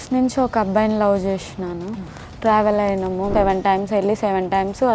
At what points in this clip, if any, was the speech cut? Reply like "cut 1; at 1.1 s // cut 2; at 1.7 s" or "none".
cut 1; at 3.3 s